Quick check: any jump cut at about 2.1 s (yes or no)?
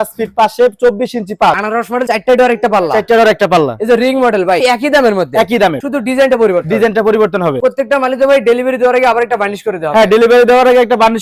yes